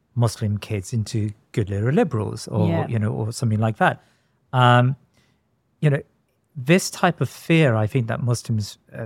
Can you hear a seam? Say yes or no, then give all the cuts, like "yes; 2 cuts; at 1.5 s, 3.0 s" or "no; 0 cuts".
no; 0 cuts